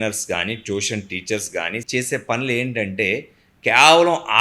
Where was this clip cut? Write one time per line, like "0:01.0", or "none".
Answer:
0:01.8